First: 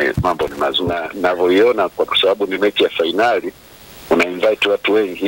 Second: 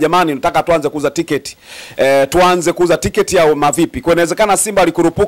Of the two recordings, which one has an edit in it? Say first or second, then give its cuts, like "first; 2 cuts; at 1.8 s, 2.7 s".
first; 1 cut; at 1.1 s